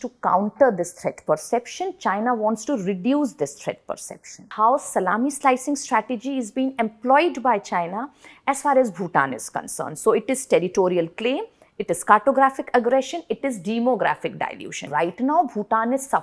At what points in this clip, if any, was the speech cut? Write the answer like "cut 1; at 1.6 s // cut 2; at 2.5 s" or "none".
cut 1; at 4.5 s // cut 2; at 14.9 s